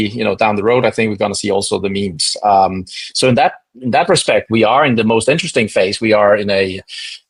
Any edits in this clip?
no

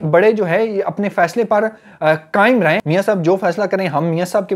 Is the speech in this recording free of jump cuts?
no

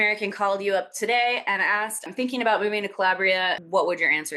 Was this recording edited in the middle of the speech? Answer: no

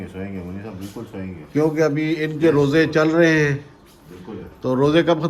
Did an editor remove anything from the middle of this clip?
no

